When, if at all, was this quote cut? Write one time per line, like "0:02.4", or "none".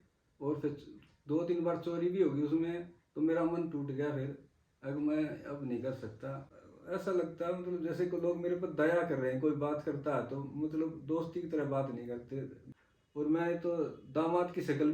0:06.5
0:12.6